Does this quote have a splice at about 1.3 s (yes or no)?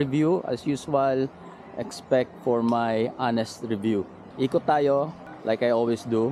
no